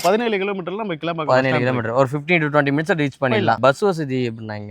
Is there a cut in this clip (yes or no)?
yes